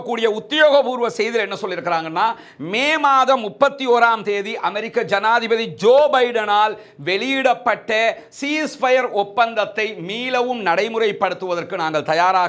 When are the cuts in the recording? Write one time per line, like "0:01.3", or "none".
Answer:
none